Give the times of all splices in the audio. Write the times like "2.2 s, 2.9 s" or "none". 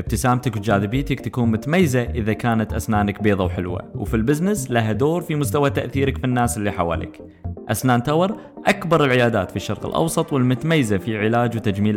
none

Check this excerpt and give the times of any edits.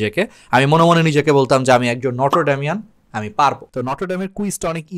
3.6 s

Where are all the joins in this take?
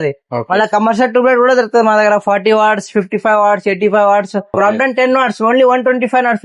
4.5 s

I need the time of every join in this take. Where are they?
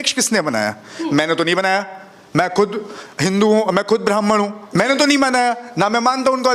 none

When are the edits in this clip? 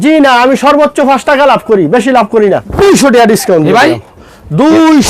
2.6 s

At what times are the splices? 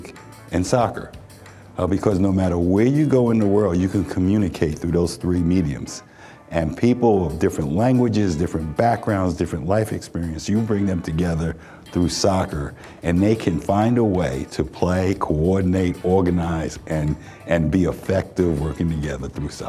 none

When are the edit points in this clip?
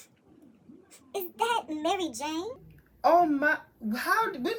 none

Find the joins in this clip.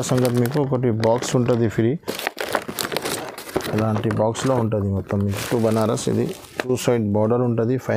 5.4 s

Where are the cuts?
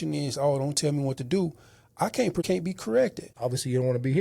2.5 s, 3.3 s

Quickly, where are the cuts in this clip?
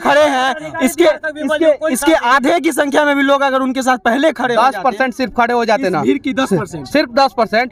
none

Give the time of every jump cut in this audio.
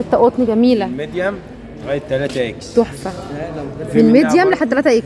none

